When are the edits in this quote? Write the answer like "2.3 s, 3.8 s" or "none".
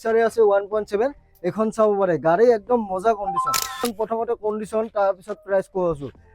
3.8 s